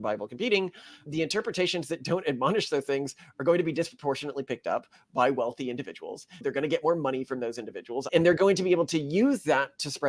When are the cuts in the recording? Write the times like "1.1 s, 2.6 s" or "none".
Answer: 6.4 s, 8.0 s